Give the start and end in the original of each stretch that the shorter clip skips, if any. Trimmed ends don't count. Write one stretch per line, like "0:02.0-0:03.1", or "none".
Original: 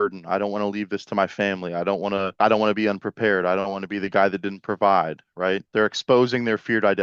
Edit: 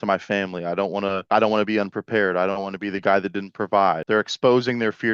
0:05.1-0:05.7

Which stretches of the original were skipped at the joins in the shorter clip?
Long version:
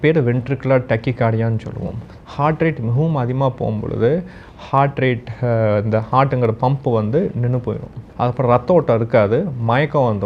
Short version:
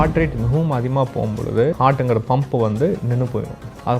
0:04.2-0:06.1

